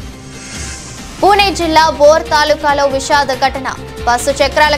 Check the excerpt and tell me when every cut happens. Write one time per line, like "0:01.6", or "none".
0:01.0